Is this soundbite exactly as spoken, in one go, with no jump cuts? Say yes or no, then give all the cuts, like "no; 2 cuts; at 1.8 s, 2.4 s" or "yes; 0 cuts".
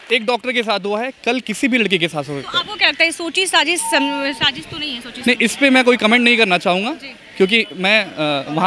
yes; 0 cuts